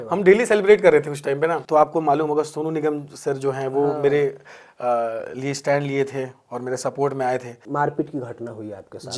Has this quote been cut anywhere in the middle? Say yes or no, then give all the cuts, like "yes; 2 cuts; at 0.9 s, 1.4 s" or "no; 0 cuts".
yes; 2 cuts; at 1.6 s, 7.6 s